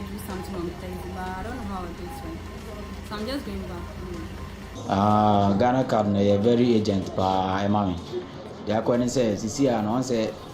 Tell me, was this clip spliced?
yes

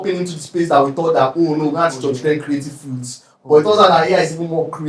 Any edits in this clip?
no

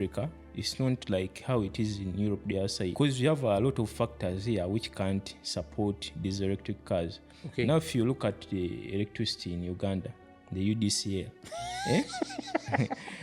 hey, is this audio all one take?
no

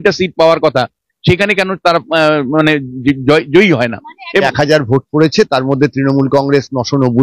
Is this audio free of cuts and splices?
no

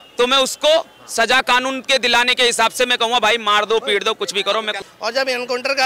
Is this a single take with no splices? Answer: no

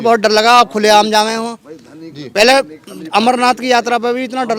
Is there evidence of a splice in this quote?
no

